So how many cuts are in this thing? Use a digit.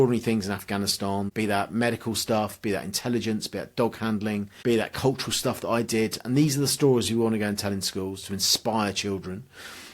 2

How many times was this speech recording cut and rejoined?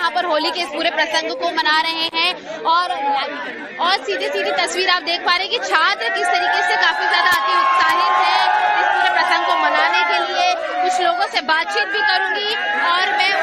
1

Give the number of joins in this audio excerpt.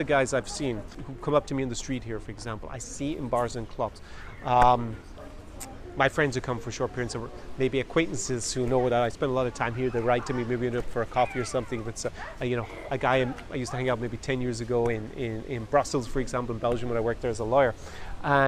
1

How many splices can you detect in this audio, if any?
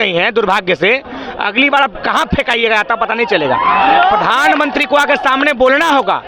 0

